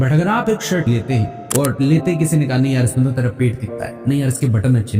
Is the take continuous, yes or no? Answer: no